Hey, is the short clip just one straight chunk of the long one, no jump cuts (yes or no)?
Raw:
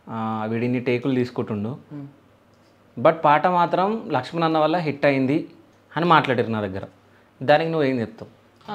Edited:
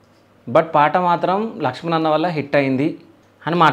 yes